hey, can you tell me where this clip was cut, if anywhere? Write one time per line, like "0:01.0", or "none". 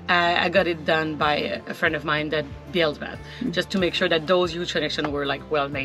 none